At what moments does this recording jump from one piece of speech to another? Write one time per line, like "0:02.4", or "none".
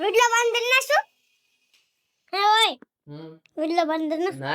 none